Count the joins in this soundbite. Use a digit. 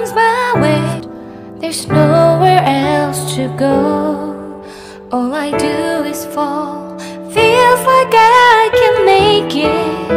1